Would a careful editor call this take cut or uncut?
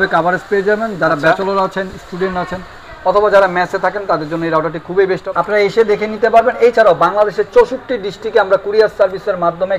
cut